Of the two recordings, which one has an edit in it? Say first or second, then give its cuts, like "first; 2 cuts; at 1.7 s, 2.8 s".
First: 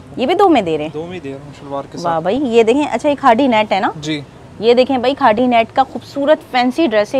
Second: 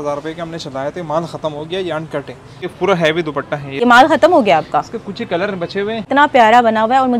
second; 3 cuts; at 2.7 s, 3.8 s, 6.1 s